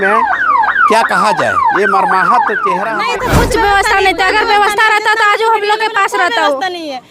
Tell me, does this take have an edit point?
yes; 1 cut; at 3.0 s

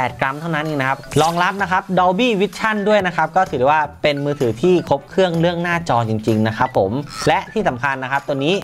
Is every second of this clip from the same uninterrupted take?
no; 2 cuts; at 1.1 s, 7.1 s

